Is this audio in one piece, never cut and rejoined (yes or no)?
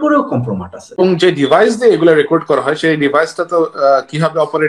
no